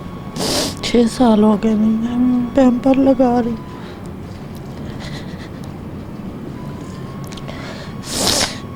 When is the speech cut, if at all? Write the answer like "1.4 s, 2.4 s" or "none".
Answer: none